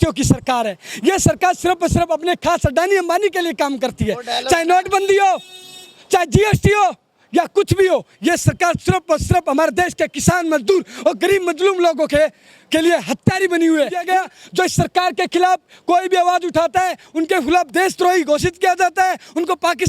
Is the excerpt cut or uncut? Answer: cut